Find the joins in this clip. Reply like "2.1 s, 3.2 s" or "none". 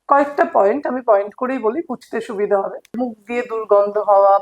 3.0 s